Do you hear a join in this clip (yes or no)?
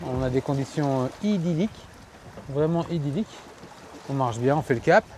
no